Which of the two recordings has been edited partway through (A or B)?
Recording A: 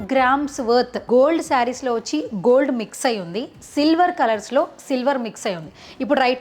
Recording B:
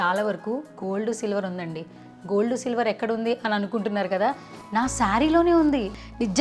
A